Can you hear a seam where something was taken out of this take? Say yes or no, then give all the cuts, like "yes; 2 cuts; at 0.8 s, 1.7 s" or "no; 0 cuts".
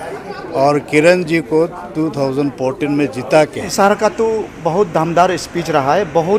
yes; 1 cut; at 3.7 s